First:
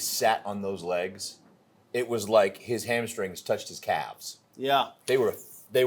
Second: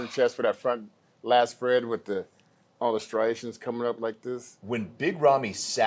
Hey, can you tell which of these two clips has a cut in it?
second; 1 cut; at 4.5 s

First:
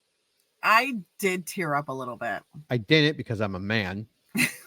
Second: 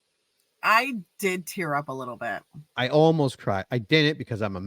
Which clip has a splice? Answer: first; 1 cut; at 2.7 s

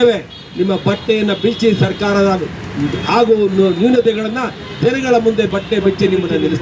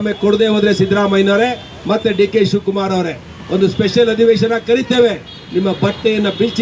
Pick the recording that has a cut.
first; 1 cut; at 5.5 s

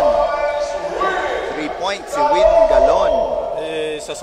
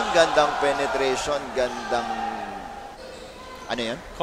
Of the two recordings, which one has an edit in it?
second; 1 cut; at 3.0 s

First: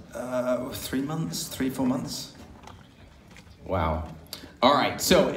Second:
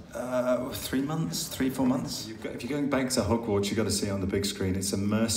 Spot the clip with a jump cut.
second; 1 cut; at 2.5 s

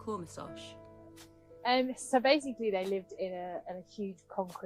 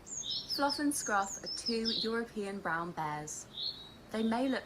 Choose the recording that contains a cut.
second; 1 cut; at 3.1 s

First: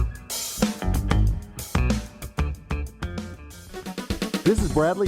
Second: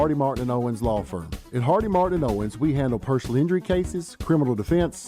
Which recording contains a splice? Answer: first; 1 cut; at 3.7 s

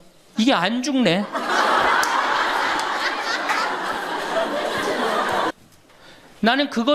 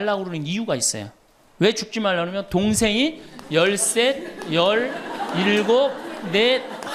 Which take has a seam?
first; 1 cut; at 5.5 s

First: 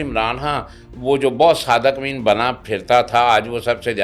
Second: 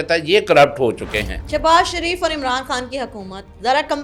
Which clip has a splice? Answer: second; 1 cut; at 1.4 s

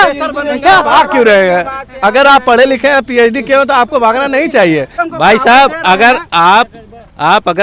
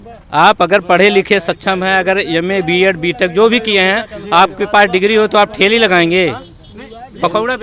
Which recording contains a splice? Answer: first; 1 cut; at 4.9 s

